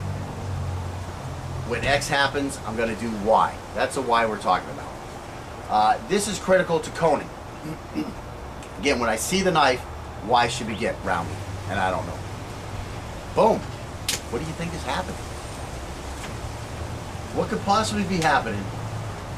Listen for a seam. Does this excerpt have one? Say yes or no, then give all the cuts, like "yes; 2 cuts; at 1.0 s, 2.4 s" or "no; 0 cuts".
no; 0 cuts